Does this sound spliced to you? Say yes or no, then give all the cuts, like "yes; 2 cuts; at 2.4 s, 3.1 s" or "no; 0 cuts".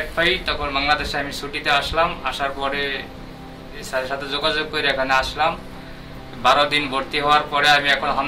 no; 0 cuts